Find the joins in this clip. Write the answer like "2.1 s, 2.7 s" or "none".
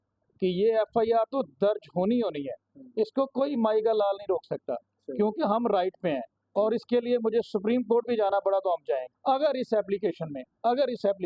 9.1 s